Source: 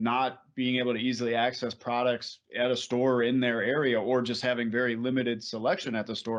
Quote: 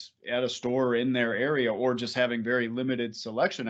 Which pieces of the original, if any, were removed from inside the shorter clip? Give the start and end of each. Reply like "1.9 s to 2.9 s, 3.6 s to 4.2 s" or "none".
none